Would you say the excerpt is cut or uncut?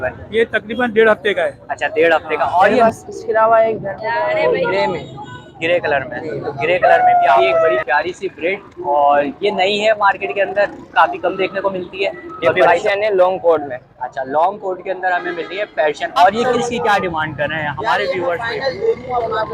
cut